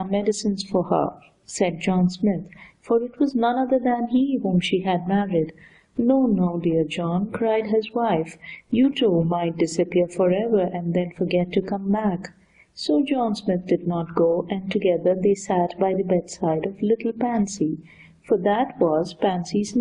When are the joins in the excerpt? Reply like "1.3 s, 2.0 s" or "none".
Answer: none